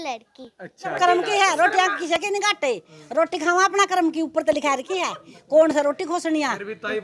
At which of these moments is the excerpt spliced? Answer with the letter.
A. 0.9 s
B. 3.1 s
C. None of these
A